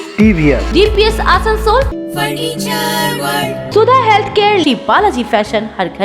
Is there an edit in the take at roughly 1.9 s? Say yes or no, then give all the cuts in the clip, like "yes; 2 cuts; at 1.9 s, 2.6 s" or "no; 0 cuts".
yes; 2 cuts; at 1.9 s, 3.7 s